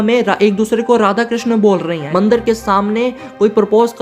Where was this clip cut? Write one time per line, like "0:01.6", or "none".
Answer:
0:02.0